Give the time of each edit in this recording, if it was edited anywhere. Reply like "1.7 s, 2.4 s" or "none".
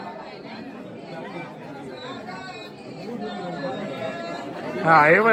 none